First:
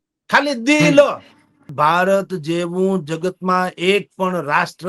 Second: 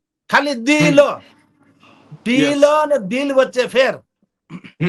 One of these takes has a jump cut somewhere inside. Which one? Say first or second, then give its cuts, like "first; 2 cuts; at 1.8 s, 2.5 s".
first; 1 cut; at 1.7 s